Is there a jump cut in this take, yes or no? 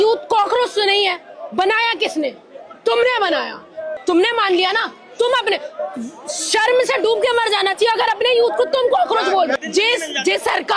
yes